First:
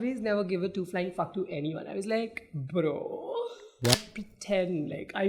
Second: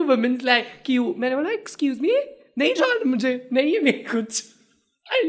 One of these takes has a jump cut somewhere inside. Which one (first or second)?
first